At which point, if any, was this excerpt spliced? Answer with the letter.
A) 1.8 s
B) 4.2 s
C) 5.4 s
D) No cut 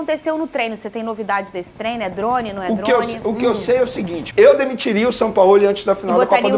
B